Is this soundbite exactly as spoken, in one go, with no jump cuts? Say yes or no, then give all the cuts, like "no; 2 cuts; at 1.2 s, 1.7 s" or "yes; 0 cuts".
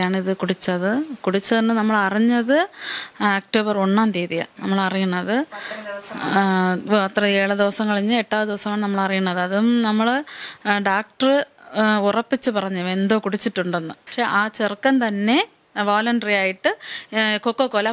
no; 1 cut; at 14.1 s